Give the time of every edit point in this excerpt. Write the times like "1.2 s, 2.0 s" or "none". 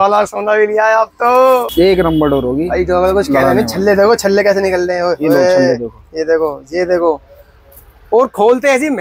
1.7 s